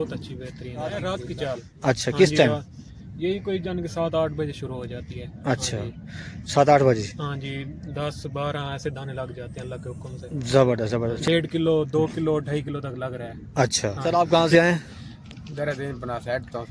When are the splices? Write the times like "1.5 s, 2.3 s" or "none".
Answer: 1.0 s, 11.2 s, 14.0 s